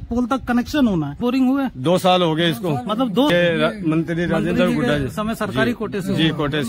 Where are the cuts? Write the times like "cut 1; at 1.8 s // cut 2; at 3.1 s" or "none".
cut 1; at 1.2 s // cut 2; at 3.3 s